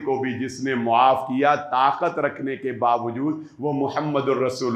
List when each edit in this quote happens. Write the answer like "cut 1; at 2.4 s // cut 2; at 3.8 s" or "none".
none

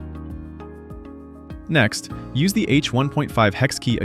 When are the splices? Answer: cut 1; at 1.0 s

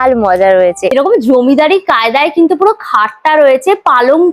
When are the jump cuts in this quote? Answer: cut 1; at 0.9 s

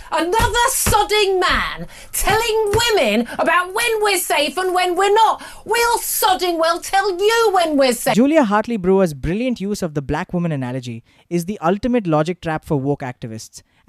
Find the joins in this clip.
cut 1; at 8.1 s

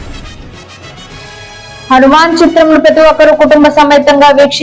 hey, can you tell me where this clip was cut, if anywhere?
cut 1; at 1.9 s

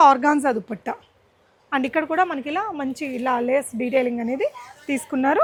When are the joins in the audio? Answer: none

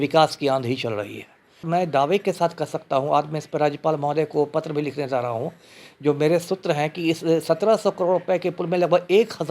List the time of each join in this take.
cut 1; at 1.6 s

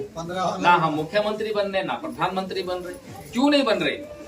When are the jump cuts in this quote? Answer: none

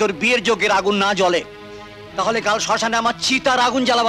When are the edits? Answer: none

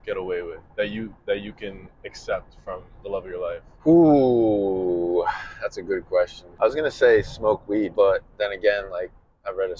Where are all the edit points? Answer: cut 1; at 3.7 s // cut 2; at 6.4 s // cut 3; at 7.9 s

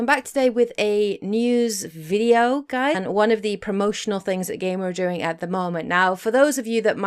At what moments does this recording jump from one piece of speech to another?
none

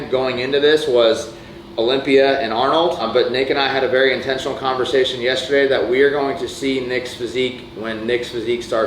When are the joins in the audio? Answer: cut 1; at 3.0 s

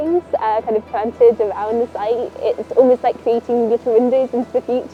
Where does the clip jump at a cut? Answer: none

